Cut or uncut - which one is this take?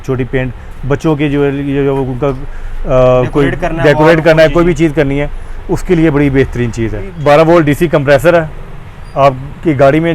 cut